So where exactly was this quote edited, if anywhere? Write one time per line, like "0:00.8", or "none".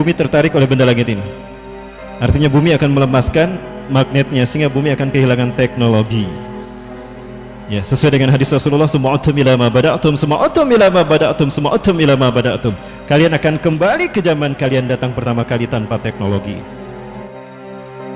0:17.2